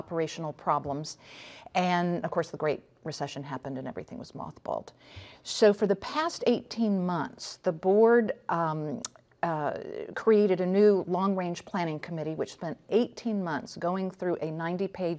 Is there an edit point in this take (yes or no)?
no